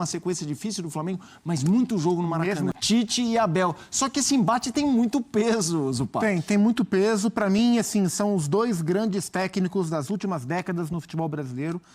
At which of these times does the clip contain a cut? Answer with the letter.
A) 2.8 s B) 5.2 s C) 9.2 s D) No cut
A